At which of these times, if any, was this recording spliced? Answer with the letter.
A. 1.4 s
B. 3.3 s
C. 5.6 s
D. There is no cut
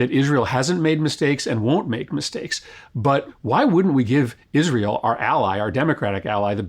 B